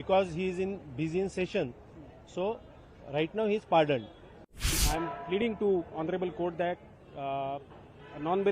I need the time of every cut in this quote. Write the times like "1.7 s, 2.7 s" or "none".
4.8 s